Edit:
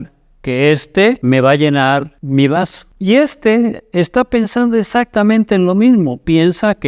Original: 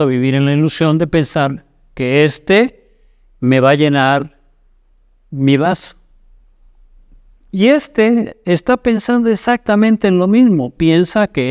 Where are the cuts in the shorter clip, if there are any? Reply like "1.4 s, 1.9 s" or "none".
1.2 s, 2.2 s, 2.8 s